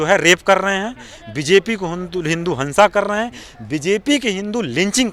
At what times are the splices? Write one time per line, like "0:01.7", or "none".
none